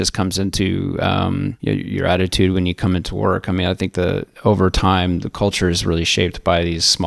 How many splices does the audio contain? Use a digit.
1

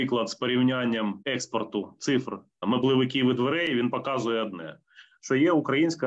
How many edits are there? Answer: 2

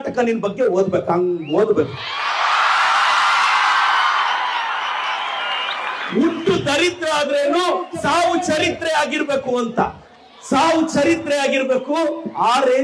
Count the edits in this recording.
0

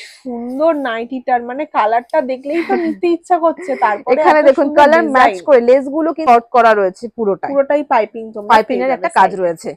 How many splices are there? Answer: 1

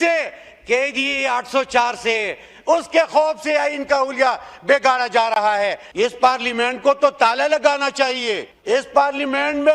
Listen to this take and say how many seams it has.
2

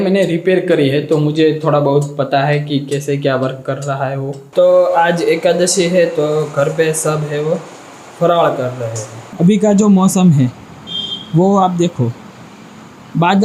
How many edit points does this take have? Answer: 2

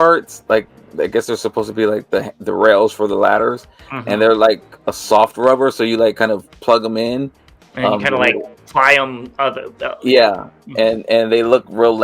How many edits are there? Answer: 0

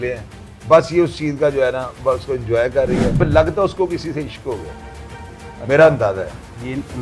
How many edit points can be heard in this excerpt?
1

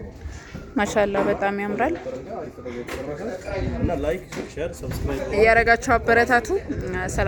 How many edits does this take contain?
0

